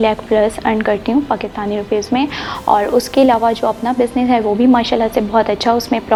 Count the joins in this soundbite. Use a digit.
0